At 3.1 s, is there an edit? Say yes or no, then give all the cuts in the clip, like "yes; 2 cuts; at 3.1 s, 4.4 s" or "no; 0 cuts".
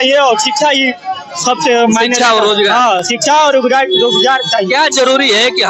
no; 0 cuts